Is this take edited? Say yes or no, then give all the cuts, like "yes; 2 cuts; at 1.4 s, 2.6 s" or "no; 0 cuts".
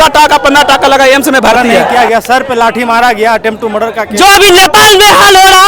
yes; 2 cuts; at 1.9 s, 4.0 s